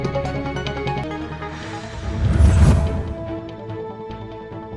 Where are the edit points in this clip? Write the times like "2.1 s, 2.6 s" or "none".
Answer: 1.0 s